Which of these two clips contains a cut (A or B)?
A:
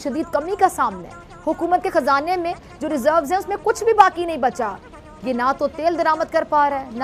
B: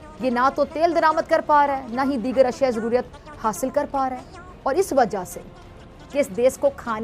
B